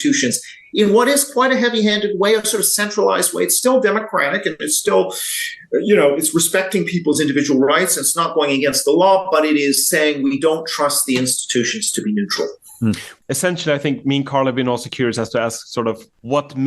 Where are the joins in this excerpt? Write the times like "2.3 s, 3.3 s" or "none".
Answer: 13.1 s